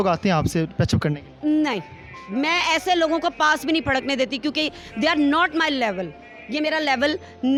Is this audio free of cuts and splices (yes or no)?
yes